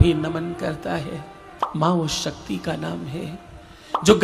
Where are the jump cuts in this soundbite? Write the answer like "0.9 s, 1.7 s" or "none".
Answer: 1.7 s